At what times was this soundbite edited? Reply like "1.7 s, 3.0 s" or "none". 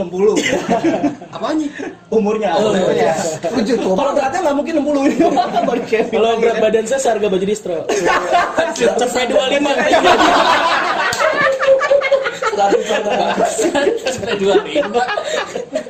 none